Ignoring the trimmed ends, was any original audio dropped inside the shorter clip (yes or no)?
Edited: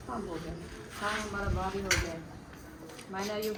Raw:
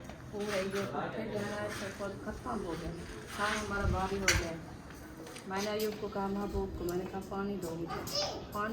no